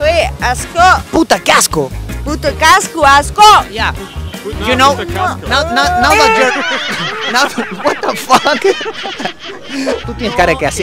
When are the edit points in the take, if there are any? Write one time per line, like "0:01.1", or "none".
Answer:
0:09.8